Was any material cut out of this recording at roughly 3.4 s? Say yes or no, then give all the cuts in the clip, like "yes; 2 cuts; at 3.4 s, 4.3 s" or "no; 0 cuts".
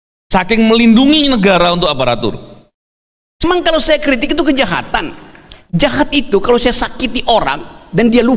yes; 1 cut; at 3.4 s